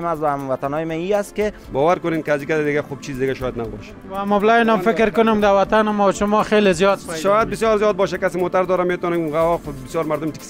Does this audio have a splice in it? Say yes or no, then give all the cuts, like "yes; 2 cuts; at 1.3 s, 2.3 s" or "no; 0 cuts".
yes; 1 cut; at 1.6 s